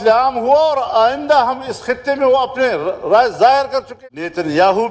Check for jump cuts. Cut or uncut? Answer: cut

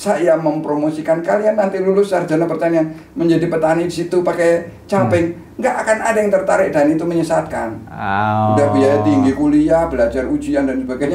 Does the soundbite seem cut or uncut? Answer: uncut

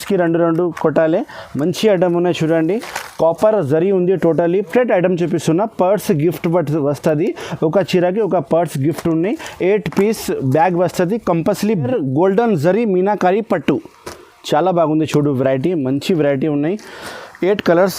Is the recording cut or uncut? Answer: cut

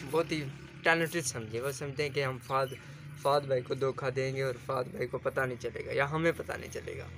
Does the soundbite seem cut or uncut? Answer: uncut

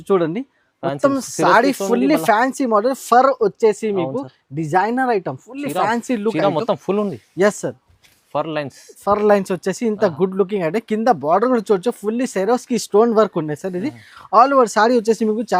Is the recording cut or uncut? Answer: uncut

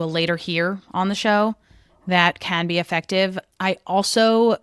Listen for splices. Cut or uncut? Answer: cut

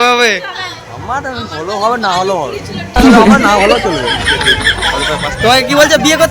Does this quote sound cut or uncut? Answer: cut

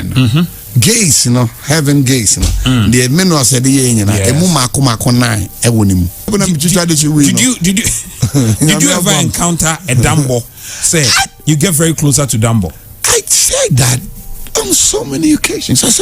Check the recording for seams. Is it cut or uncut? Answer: cut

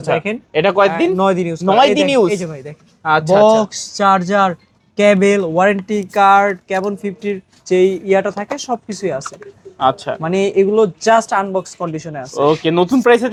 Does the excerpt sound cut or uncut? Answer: uncut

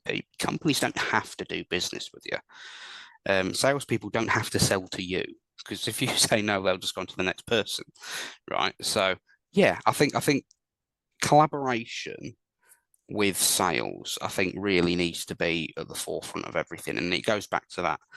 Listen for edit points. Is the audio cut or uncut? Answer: uncut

